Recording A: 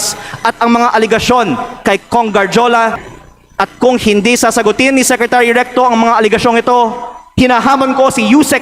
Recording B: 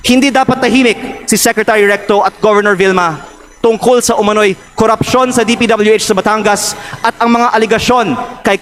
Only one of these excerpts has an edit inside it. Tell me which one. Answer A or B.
A